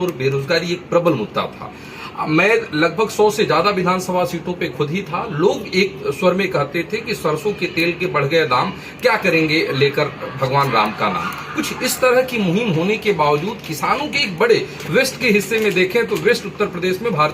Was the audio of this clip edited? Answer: no; 0 cuts

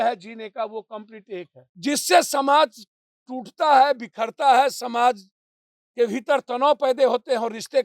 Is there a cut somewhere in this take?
yes; 1 cut; at 1.6 s

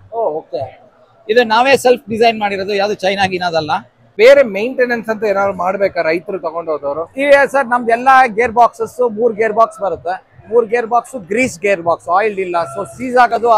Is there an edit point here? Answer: yes; 1 cut; at 4.1 s

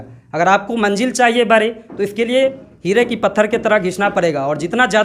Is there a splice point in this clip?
yes; 1 cut; at 2.7 s

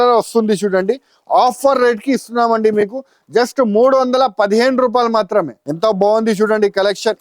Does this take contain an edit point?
yes; 1 cut; at 5.6 s

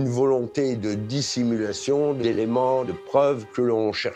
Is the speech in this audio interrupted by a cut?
yes; 1 cut; at 2.6 s

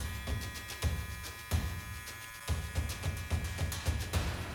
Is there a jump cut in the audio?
no; 0 cuts

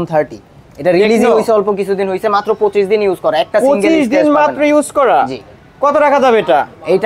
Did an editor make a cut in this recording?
no; 0 cuts

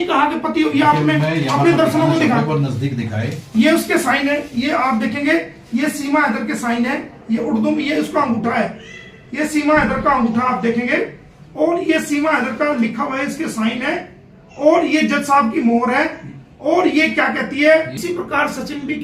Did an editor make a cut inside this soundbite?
yes; 1 cut; at 17.9 s

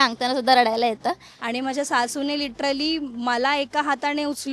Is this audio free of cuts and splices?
no; 1 cut; at 1.2 s

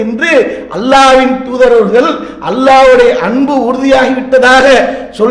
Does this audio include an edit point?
no; 0 cuts

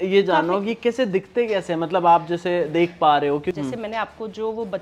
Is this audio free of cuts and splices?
no; 1 cut; at 3.6 s

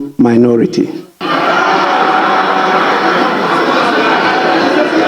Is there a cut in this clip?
no; 0 cuts

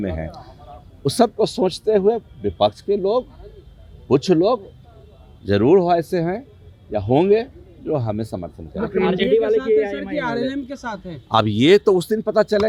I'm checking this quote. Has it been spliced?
no; 0 cuts

